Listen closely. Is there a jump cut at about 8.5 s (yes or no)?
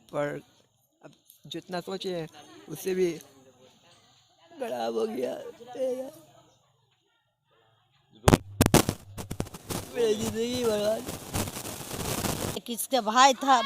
yes